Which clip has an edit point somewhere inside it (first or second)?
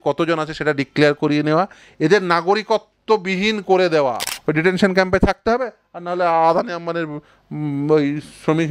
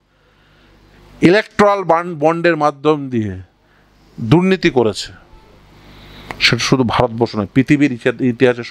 first